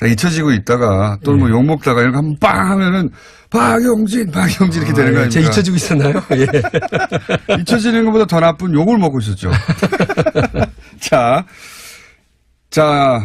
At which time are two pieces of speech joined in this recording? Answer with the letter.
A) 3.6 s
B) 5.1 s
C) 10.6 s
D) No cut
A